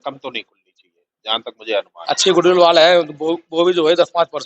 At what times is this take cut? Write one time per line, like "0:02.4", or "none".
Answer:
0:02.0